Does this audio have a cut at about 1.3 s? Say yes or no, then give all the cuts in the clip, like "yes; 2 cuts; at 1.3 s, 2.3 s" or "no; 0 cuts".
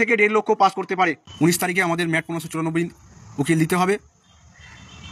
yes; 1 cut; at 1.3 s